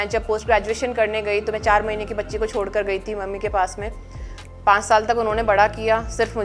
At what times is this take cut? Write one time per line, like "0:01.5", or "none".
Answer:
none